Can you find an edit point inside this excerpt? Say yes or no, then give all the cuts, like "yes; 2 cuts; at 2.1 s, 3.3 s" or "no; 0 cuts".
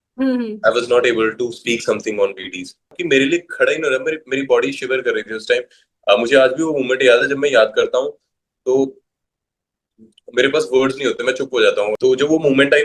yes; 2 cuts; at 3.0 s, 11.9 s